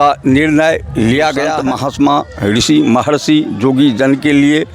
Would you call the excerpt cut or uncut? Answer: cut